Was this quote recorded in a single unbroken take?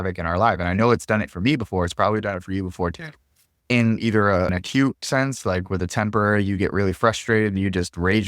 no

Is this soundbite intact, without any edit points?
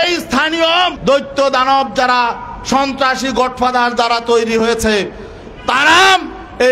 no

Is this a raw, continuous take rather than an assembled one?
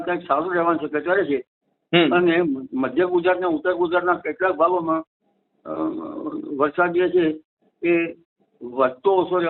yes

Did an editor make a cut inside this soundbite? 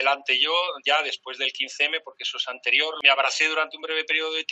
yes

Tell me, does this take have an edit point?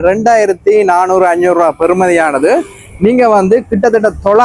no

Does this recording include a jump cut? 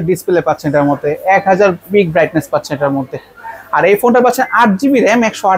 no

